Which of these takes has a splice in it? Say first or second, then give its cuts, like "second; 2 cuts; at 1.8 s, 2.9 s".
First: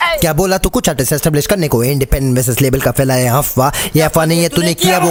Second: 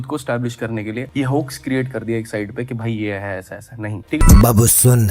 second; 2 cuts; at 1.1 s, 4.2 s